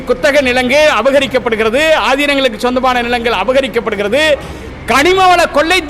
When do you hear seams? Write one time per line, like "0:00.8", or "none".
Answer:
none